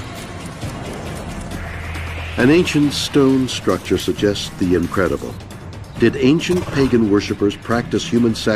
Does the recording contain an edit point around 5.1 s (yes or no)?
no